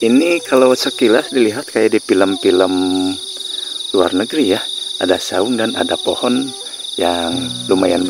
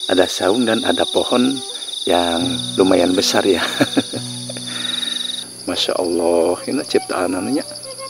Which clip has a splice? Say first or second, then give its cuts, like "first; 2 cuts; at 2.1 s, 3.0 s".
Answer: second; 1 cut; at 5.3 s